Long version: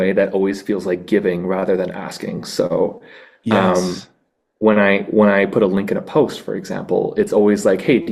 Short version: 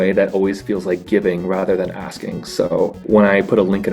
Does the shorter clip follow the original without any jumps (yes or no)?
no